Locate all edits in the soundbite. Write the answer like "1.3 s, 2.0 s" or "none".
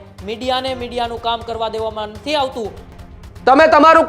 2.8 s